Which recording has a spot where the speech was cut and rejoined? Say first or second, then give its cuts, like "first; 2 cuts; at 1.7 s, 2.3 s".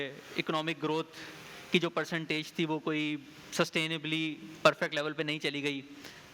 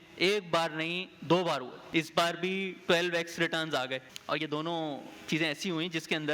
second; 2 cuts; at 1.8 s, 4.1 s